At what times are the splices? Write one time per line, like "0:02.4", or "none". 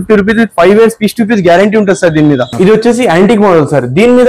0:02.5